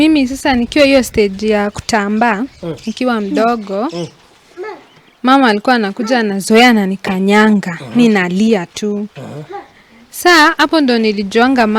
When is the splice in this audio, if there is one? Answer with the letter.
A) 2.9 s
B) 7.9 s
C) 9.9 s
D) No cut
D